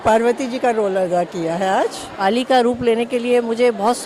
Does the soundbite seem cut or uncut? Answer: cut